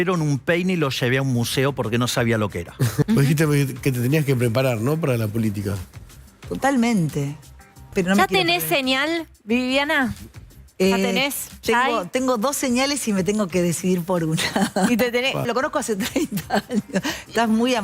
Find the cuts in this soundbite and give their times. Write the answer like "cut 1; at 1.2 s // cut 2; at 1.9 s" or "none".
cut 1; at 3.0 s // cut 2; at 7.9 s // cut 3; at 15.5 s